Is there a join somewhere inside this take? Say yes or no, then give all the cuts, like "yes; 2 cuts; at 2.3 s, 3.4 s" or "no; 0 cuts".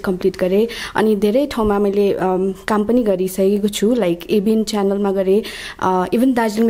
no; 0 cuts